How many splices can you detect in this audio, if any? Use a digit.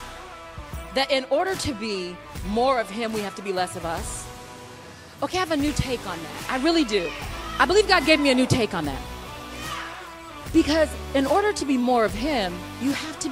1